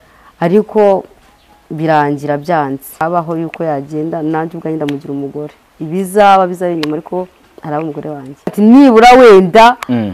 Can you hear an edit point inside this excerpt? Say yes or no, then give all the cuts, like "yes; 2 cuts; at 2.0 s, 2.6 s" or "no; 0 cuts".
yes; 2 cuts; at 3.0 s, 8.5 s